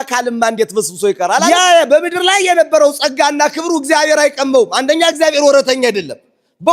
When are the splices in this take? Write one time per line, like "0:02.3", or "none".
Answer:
0:01.4